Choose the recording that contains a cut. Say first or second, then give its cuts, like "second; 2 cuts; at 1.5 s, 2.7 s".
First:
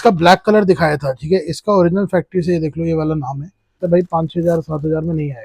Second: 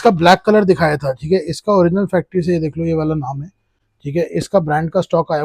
first; 1 cut; at 3.8 s